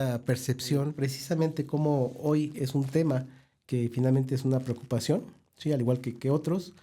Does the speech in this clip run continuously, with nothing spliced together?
no; 1 cut; at 0.9 s

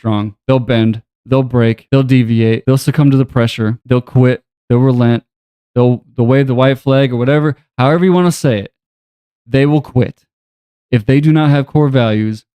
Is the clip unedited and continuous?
no; 3 cuts; at 1.8 s, 2.6 s, 3.8 s

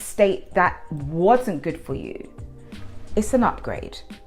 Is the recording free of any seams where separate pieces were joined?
yes; 0 cuts

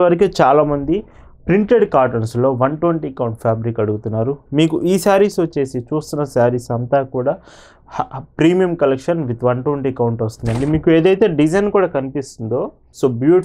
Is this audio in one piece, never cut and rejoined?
yes; 0 cuts

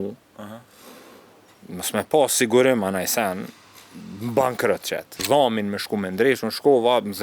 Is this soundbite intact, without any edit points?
no; 1 cut; at 5.2 s

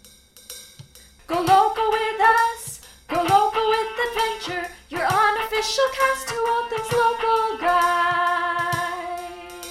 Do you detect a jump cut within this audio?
yes; 1 cut; at 1.1 s

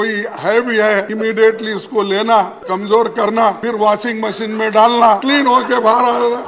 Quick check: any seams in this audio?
yes; 4 cuts; at 1.1 s, 2.6 s, 3.6 s, 5.2 s

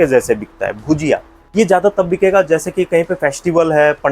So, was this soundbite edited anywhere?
yes; 1 cut; at 1.4 s

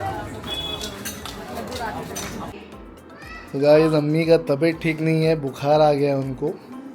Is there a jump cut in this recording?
yes; 1 cut; at 2.6 s

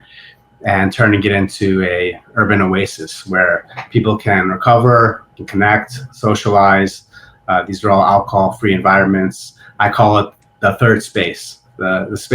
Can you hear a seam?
yes; 1 cut; at 5.3 s

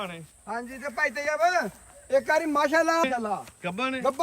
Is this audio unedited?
no; 1 cut; at 3.0 s

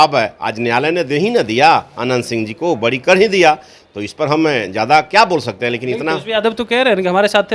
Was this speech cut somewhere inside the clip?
no; 0 cuts

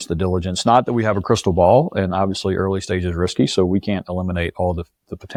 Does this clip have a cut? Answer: no; 0 cuts

